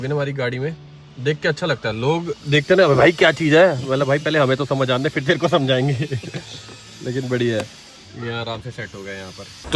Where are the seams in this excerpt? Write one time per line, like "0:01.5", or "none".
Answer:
none